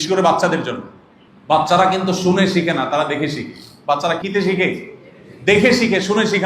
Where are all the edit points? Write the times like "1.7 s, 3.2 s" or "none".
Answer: 4.2 s